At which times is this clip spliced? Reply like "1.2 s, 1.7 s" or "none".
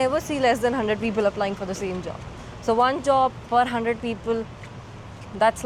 none